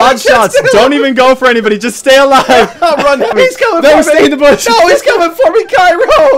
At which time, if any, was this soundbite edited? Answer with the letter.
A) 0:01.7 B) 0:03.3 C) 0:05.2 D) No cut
B